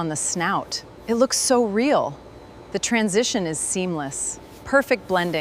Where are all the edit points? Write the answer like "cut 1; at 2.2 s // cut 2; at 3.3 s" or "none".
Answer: none